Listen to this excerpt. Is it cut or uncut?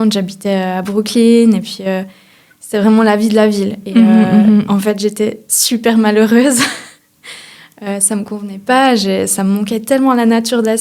uncut